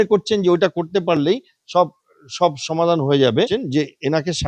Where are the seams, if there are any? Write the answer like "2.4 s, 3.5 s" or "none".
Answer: 3.5 s